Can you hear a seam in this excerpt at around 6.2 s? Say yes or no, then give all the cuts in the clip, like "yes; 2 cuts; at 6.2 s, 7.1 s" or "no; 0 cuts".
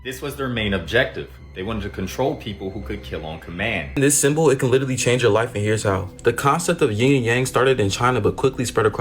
no; 1 cut; at 3.9 s